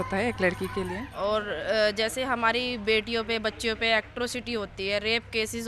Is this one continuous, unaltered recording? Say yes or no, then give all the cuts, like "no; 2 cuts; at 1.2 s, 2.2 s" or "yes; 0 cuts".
no; 1 cut; at 1.0 s